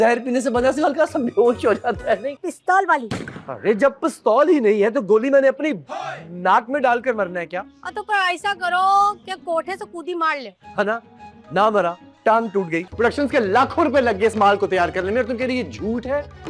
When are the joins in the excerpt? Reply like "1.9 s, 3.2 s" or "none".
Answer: 2.4 s, 12.9 s